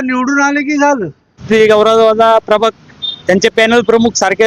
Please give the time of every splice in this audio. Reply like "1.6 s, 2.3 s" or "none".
1.4 s